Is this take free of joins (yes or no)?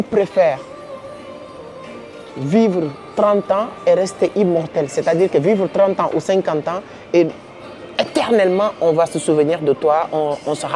yes